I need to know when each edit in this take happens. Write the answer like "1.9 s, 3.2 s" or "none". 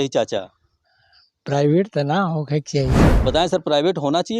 3.0 s